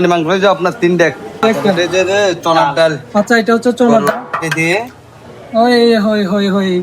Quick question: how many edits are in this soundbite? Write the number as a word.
one